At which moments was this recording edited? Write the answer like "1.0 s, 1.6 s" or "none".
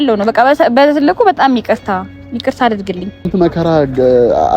3.3 s